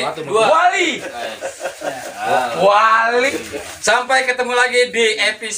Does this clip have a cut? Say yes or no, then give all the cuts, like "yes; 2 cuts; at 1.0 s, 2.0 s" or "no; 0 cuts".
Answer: yes; 1 cut; at 3.4 s